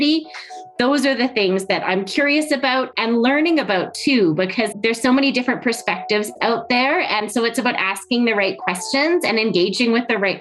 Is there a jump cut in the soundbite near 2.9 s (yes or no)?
yes